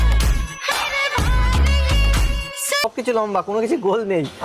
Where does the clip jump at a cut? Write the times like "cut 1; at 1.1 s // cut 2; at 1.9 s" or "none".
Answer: cut 1; at 2.8 s